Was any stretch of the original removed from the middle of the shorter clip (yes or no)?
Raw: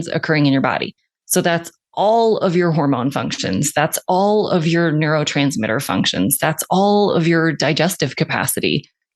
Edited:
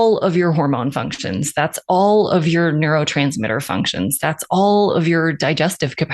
no